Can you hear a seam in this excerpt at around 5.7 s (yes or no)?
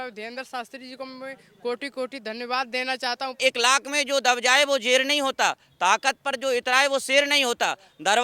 no